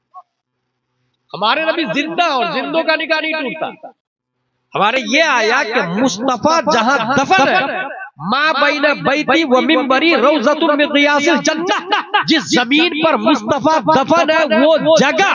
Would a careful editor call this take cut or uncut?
cut